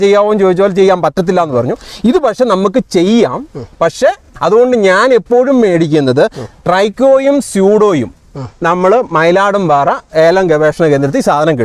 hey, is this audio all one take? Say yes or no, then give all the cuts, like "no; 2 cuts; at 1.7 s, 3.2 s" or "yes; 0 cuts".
no; 1 cut; at 4.2 s